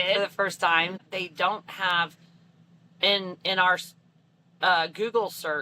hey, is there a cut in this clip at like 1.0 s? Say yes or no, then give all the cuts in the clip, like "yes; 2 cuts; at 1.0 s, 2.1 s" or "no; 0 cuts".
yes; 1 cut; at 1.0 s